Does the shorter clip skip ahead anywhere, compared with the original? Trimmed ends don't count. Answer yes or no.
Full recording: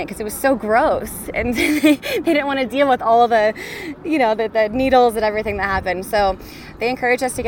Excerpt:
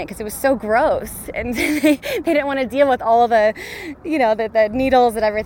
no